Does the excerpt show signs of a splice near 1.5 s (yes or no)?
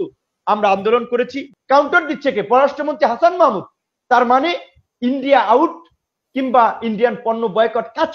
yes